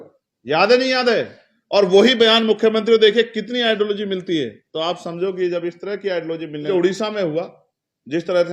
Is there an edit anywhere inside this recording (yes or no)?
yes